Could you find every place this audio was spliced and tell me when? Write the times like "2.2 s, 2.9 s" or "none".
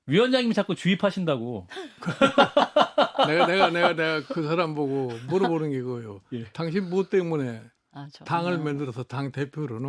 none